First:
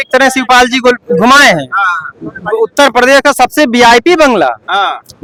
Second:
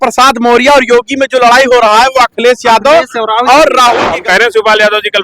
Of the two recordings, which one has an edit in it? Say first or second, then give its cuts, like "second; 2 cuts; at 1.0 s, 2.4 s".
second; 1 cut; at 4.1 s